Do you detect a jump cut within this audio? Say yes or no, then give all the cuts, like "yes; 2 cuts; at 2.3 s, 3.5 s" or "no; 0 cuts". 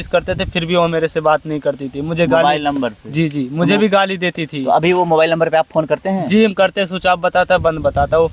no; 0 cuts